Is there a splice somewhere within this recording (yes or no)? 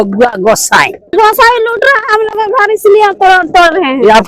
yes